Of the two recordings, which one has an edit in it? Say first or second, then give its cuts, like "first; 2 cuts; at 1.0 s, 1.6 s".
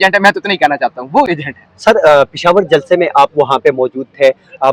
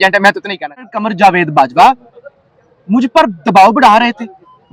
second; 1 cut; at 0.9 s